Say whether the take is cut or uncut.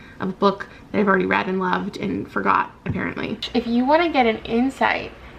cut